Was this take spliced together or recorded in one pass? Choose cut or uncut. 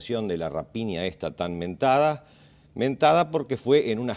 cut